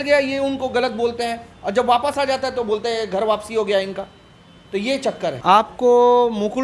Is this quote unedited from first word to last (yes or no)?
no